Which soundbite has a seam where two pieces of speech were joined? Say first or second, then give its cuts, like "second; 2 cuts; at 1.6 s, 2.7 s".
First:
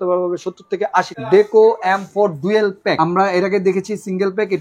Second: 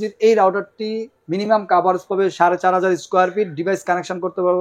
first; 2 cuts; at 1.2 s, 3.0 s